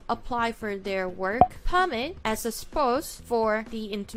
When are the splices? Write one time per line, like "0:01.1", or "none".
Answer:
none